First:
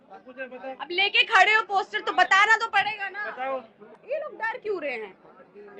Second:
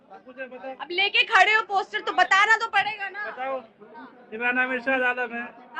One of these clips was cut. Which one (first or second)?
first